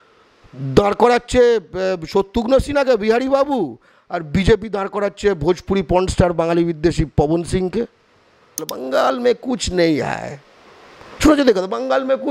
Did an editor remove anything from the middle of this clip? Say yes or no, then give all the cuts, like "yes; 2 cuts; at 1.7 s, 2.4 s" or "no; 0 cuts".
yes; 1 cut; at 8.7 s